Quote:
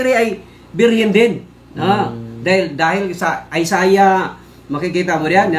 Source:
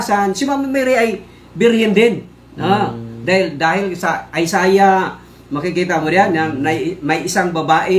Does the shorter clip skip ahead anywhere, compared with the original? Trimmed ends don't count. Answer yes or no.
no